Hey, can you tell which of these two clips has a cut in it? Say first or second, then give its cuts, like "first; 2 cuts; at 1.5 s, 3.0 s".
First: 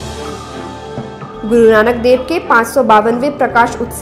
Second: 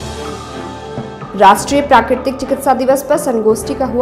first; 1 cut; at 1.0 s